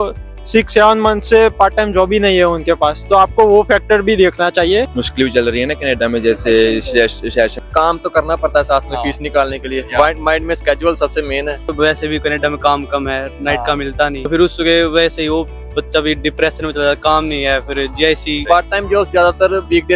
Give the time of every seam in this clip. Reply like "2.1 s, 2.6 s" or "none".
4.9 s, 7.6 s, 11.7 s, 14.3 s, 18.4 s

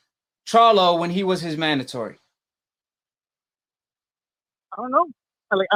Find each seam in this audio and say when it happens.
none

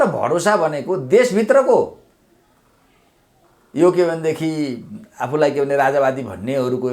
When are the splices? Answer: none

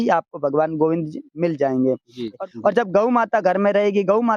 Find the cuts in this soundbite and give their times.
2.4 s

